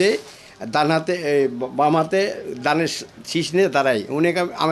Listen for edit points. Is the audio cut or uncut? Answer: uncut